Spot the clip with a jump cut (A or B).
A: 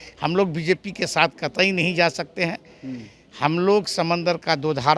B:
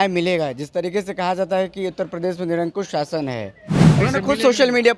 B